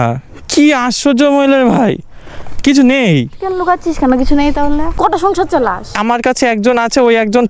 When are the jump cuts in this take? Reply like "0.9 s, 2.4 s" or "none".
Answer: 4.9 s, 5.9 s